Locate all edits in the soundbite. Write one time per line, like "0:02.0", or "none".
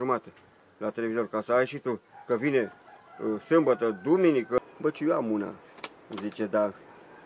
0:04.6